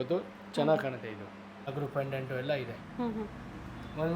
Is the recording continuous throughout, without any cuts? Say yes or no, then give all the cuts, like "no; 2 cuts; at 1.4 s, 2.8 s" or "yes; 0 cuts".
no; 1 cut; at 1.7 s